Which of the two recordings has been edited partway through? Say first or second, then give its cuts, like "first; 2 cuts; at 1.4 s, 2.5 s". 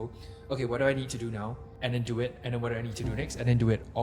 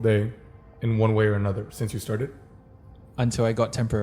first; 1 cut; at 1.6 s